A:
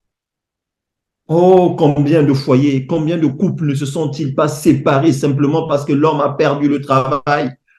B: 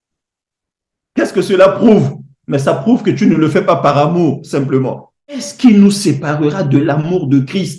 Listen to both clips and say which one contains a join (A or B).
B